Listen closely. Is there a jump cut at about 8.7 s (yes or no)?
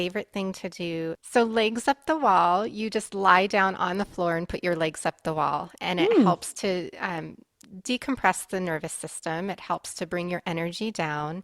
no